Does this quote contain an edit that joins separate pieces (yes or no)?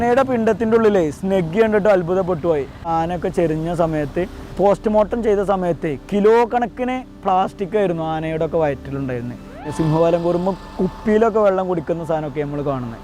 yes